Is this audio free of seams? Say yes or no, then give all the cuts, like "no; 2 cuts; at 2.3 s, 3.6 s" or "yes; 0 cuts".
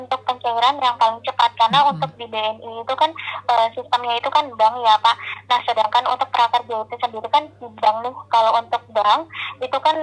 yes; 0 cuts